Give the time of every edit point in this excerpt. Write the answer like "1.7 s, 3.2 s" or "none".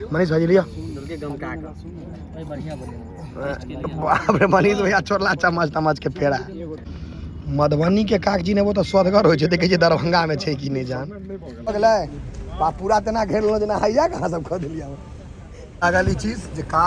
6.9 s, 11.7 s, 15.8 s